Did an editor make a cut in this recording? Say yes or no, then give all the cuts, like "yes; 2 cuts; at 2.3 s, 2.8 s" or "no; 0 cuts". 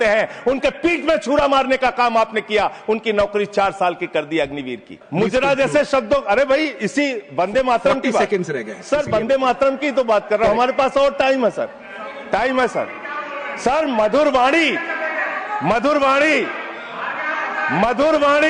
yes; 1 cut; at 5.0 s